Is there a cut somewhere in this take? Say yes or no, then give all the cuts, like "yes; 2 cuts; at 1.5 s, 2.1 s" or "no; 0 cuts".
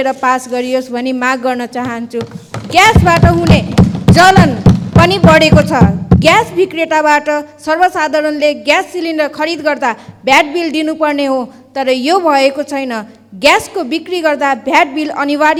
no; 0 cuts